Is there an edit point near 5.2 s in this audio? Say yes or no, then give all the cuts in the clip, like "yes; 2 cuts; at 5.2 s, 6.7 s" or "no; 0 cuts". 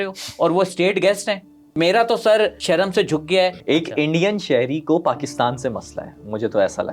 no; 3 cuts; at 1.7 s, 2.6 s, 3.6 s